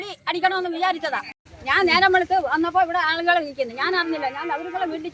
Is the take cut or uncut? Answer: cut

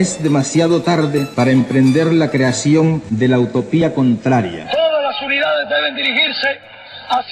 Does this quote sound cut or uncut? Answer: cut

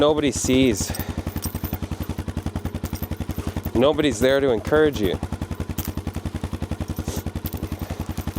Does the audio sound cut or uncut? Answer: uncut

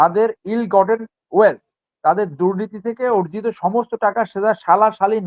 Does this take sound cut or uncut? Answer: uncut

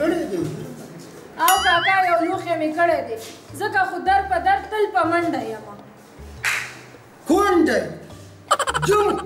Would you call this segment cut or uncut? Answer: uncut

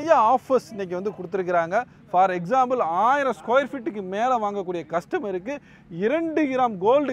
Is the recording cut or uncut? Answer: uncut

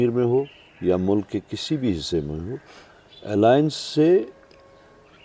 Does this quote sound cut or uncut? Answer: uncut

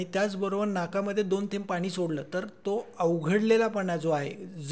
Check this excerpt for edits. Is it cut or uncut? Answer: uncut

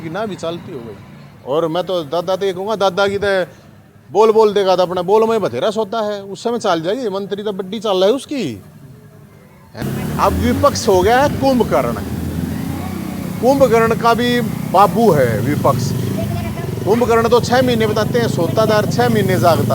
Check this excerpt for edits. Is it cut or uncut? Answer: cut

